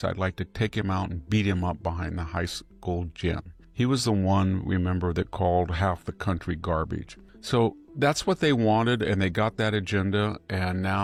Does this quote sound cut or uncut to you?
uncut